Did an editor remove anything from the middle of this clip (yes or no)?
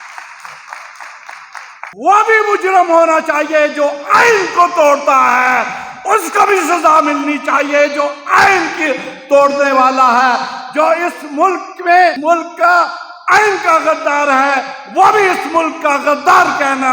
yes